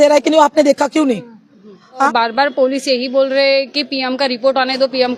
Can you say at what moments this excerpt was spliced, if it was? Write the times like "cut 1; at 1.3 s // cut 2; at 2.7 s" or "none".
cut 1; at 2.1 s